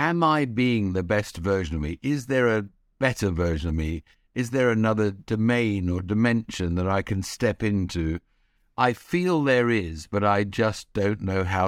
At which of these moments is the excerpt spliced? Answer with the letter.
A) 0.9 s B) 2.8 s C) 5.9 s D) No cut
D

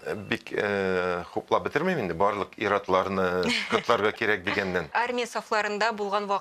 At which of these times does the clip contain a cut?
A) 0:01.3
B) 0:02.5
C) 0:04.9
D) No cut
C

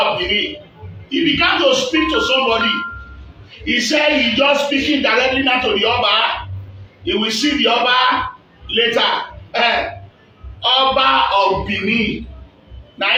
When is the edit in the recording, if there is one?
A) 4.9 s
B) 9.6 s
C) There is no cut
C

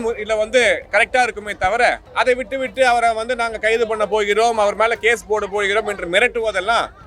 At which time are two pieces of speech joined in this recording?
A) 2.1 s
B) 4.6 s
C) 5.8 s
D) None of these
A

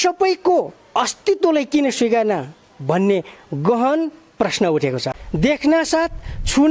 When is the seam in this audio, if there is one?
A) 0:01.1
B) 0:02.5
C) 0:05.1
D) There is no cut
C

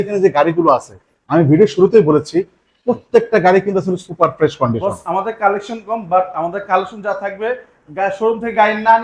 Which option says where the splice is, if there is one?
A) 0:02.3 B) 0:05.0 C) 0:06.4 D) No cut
D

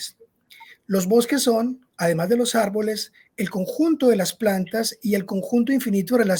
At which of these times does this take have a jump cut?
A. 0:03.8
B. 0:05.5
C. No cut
C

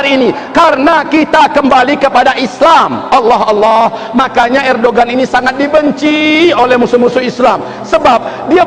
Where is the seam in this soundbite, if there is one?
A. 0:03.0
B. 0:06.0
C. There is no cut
C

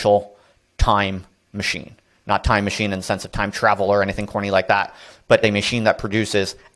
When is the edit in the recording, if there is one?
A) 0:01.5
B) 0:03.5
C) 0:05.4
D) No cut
C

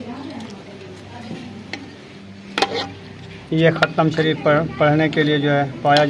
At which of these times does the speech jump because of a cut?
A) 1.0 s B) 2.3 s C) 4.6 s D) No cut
B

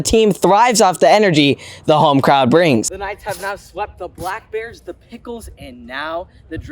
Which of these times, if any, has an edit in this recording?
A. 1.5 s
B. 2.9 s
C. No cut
B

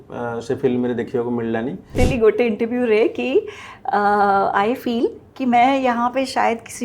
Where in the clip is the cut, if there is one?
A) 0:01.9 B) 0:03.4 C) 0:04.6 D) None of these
A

